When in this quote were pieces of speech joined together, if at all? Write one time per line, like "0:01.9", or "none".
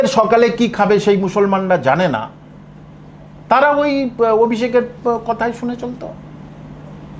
none